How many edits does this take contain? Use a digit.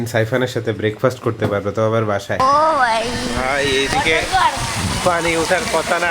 1